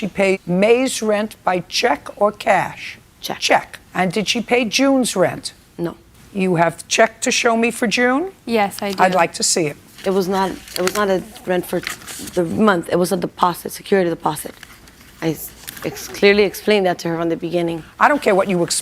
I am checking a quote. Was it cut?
yes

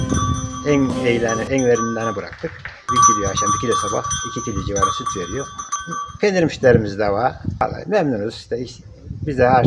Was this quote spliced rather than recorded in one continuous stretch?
yes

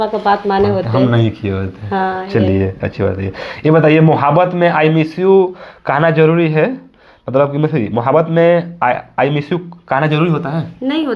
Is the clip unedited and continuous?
yes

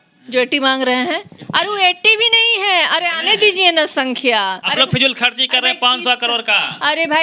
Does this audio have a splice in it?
yes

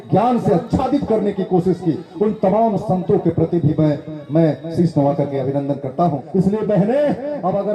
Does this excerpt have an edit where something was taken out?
yes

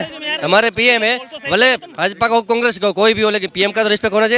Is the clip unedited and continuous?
yes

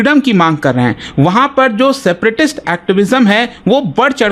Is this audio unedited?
yes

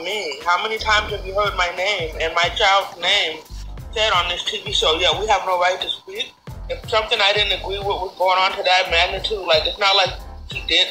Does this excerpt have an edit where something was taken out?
yes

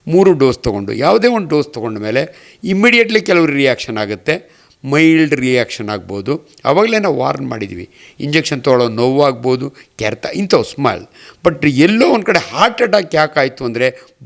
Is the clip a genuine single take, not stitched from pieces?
yes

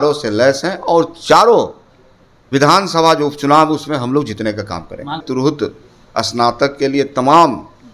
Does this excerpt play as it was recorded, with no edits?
no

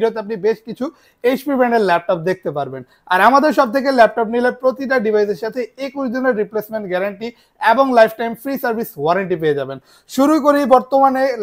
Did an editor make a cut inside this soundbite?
no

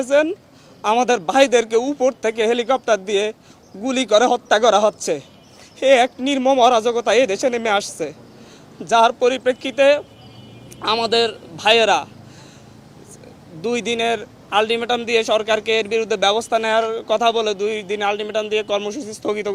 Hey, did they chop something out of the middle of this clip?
no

